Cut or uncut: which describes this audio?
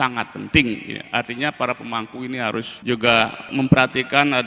cut